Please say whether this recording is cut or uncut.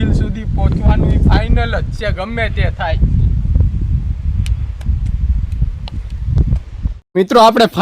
uncut